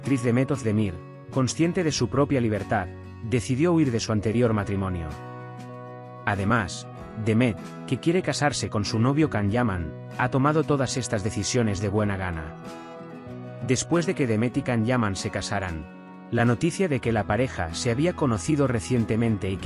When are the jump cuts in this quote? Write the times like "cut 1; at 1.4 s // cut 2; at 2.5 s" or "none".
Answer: cut 1; at 12.4 s // cut 2; at 13.6 s